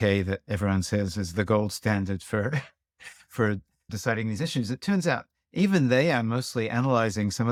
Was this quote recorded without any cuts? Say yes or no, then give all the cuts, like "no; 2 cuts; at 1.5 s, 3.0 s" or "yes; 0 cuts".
yes; 0 cuts